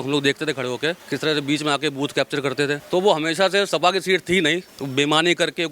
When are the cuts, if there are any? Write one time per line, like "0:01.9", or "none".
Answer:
0:01.1
0:02.8
0:04.7